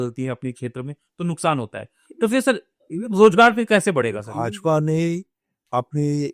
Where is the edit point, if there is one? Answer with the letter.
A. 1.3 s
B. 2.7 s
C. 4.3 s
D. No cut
C